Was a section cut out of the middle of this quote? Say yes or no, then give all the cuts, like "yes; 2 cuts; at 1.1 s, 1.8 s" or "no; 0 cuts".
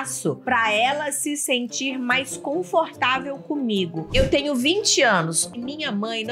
yes; 2 cuts; at 4.1 s, 5.4 s